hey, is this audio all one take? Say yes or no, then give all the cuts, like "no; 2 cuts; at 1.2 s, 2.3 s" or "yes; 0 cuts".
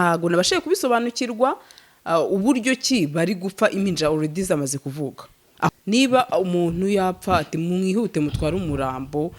no; 1 cut; at 5.7 s